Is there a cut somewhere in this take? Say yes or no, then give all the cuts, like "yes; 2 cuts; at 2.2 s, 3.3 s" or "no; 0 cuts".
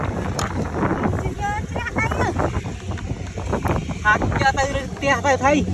no; 0 cuts